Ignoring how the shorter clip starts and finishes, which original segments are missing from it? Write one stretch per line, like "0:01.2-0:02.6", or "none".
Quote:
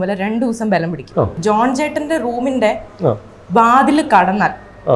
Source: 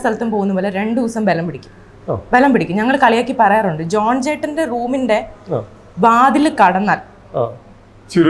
0:01.9-0:03.8